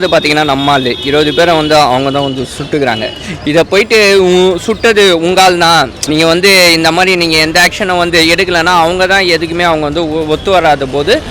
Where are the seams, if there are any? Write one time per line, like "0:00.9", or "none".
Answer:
0:06.0